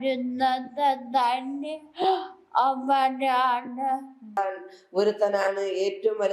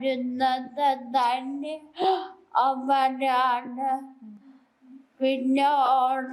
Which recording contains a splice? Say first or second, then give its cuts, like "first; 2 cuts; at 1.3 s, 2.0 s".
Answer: first; 1 cut; at 4.4 s